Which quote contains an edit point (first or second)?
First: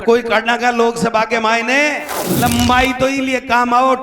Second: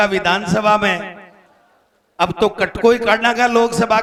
first